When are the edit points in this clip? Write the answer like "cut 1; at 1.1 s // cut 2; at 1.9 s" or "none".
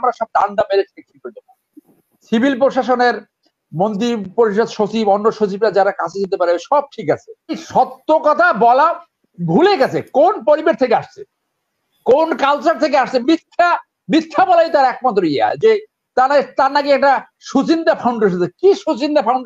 cut 1; at 7.6 s